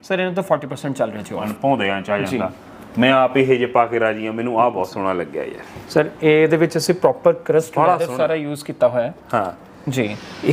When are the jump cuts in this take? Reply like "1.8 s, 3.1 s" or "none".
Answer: 1.5 s